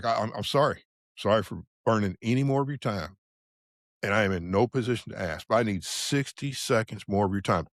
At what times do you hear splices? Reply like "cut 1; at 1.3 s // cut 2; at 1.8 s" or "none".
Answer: none